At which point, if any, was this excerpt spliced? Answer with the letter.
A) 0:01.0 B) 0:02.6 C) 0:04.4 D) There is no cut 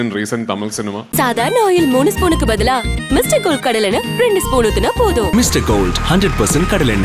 A